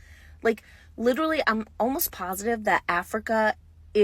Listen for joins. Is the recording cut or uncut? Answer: uncut